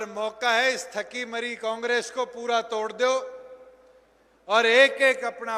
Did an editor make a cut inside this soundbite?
no; 0 cuts

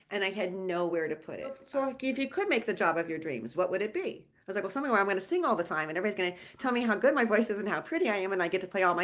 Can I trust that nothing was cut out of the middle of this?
no; 1 cut; at 1.6 s

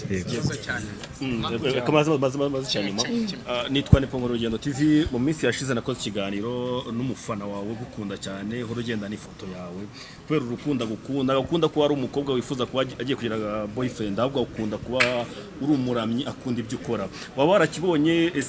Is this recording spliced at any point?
no; 0 cuts

